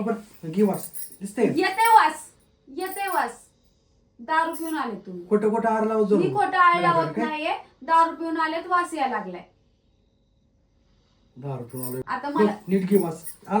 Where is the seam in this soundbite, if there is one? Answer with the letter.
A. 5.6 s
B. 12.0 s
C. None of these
B